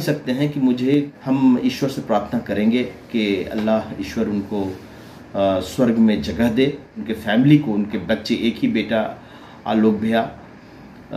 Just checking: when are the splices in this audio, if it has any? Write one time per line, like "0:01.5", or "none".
0:01.1
0:07.1